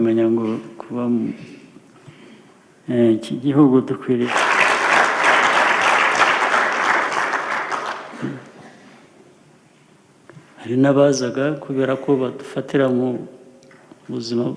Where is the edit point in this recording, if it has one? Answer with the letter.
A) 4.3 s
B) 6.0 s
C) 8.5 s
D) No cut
A